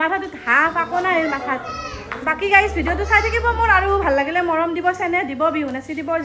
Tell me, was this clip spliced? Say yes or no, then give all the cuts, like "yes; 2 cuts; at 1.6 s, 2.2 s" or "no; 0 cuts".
no; 0 cuts